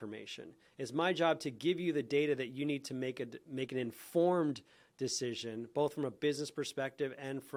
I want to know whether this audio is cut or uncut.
uncut